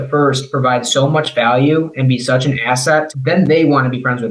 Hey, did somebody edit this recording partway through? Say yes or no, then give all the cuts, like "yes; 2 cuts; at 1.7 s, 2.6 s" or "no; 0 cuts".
no; 0 cuts